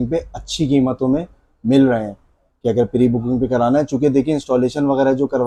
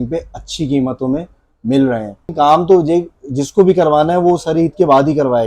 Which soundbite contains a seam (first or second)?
second